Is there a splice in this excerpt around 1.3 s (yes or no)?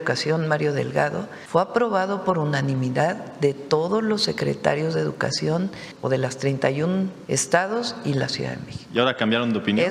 yes